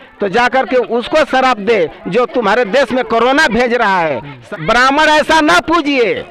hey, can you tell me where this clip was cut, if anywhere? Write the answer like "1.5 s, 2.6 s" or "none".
4.4 s